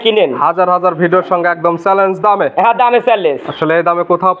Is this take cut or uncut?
uncut